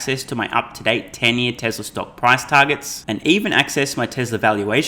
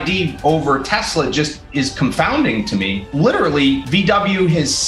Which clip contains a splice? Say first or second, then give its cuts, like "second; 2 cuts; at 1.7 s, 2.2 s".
second; 2 cuts; at 3.0 s, 3.9 s